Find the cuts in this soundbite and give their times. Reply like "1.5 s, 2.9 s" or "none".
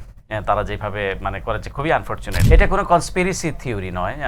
2.3 s